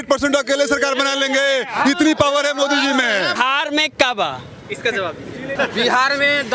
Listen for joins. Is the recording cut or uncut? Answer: cut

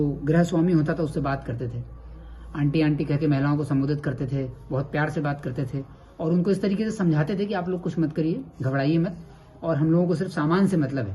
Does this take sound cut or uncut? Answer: uncut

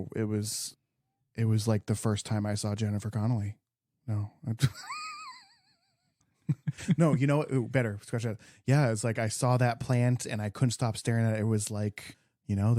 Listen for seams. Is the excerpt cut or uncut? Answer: cut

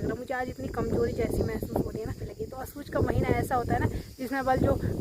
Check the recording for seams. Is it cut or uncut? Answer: cut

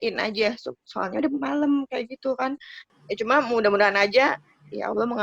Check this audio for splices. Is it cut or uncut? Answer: cut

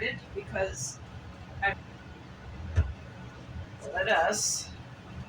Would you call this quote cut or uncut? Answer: cut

